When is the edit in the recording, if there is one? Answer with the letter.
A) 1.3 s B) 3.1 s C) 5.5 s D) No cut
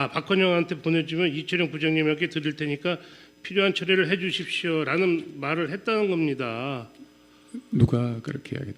C